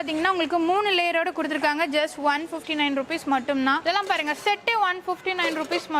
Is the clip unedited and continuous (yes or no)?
no